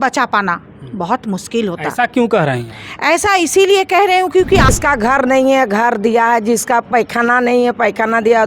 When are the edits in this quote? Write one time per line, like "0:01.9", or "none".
0:04.7